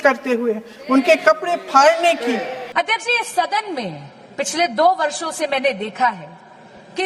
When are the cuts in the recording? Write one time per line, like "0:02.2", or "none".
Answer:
0:02.6